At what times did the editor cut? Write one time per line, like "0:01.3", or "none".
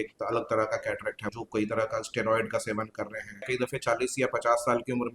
0:01.3
0:03.4